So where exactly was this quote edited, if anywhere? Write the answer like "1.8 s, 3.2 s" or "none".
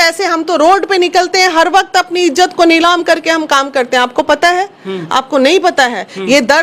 none